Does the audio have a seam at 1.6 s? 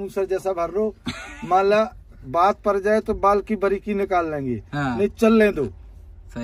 no; 0 cuts

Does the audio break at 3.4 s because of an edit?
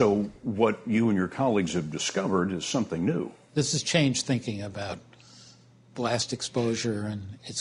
yes; 1 cut; at 3.4 s

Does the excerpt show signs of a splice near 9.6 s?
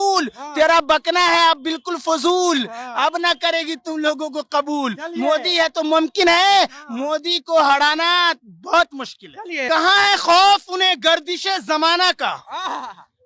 yes; 1 cut; at 9.6 s

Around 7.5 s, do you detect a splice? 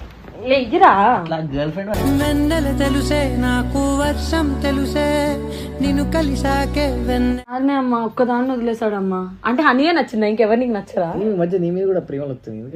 yes; 1 cut; at 7.5 s

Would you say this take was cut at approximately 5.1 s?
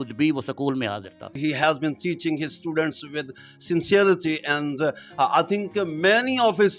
no; 1 cut; at 1.6 s

